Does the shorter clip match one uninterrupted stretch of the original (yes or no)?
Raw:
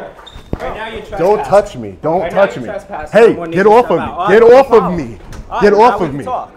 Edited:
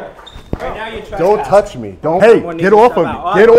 no